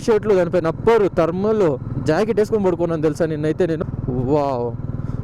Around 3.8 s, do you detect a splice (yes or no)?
yes